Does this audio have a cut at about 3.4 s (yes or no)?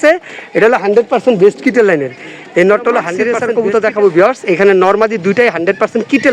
yes